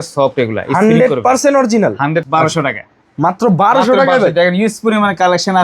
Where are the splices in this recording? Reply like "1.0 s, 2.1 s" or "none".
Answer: 2.3 s